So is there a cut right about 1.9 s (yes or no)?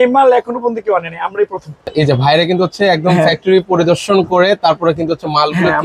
yes